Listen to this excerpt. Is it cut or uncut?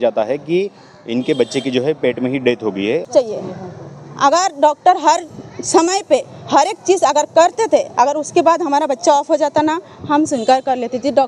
cut